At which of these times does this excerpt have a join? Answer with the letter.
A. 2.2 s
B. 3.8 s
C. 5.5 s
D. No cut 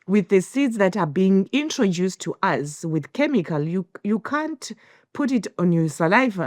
C